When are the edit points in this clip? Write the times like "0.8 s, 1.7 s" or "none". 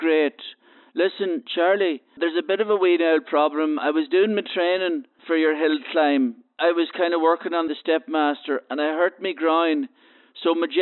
2.1 s, 5.2 s, 6.5 s, 7.8 s